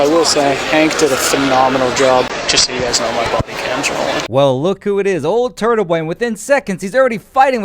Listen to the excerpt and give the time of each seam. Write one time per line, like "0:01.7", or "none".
0:02.3
0:04.3

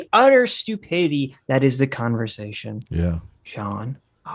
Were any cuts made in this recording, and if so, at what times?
none

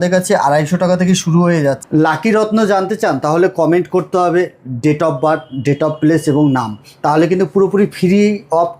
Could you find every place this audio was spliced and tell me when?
0:01.8

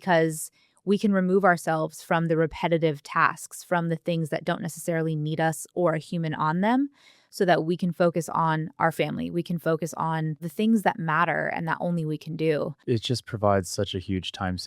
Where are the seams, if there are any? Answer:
0:10.5
0:12.8

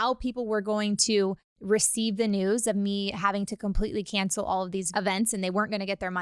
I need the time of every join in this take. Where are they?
0:04.9

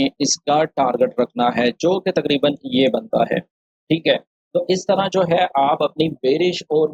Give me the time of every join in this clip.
none

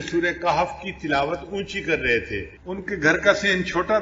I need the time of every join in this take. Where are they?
0:02.5

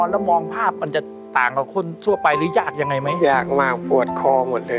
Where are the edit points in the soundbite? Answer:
none

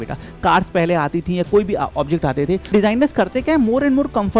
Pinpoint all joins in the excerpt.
0:02.7

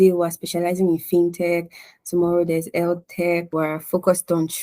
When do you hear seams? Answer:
0:03.5

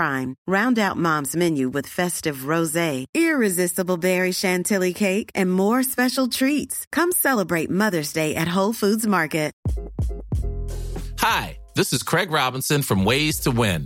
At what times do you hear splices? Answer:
none

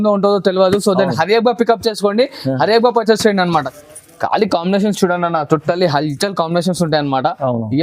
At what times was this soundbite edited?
0:03.7

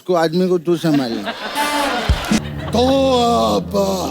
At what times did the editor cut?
0:02.4

